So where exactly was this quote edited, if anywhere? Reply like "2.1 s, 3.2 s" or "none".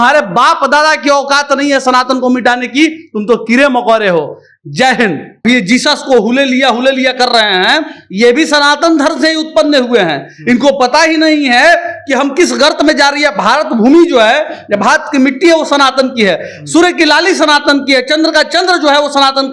5.4 s